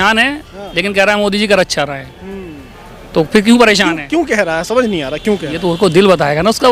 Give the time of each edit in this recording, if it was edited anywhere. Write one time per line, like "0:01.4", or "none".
none